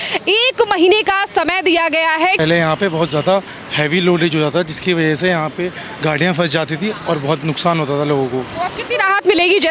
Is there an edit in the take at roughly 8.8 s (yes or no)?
no